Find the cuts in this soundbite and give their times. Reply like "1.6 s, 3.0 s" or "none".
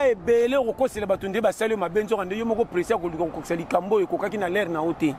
none